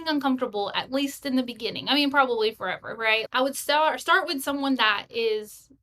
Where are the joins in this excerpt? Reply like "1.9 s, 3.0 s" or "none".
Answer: 3.3 s